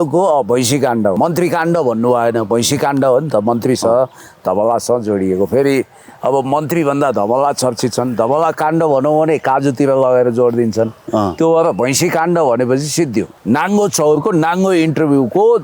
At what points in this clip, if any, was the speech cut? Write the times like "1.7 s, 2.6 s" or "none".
1.2 s, 13.3 s